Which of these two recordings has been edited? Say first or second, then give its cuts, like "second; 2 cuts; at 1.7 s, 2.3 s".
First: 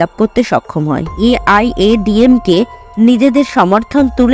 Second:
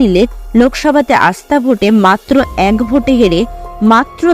first; 1 cut; at 1.1 s